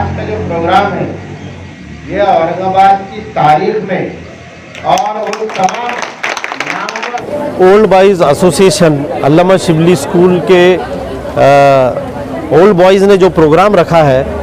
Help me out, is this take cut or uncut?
cut